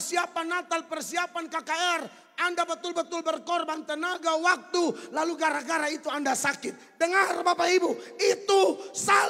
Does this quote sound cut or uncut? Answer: uncut